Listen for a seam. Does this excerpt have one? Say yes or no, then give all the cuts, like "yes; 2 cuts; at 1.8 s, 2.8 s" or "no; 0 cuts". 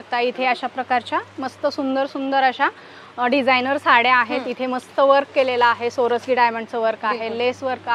no; 0 cuts